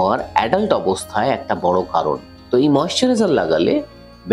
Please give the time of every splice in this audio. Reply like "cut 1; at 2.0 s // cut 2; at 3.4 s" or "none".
cut 1; at 2.3 s